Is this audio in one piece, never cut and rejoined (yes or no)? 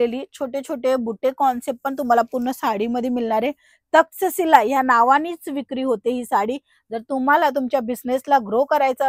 yes